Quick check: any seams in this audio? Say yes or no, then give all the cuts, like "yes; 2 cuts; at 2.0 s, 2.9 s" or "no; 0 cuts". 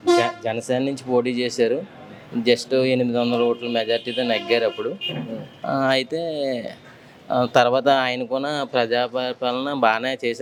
no; 0 cuts